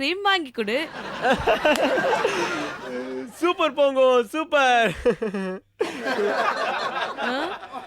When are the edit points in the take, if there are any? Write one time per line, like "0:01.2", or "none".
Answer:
none